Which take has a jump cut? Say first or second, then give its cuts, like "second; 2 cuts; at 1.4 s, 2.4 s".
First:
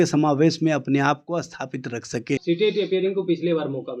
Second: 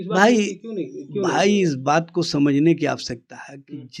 first; 1 cut; at 2.4 s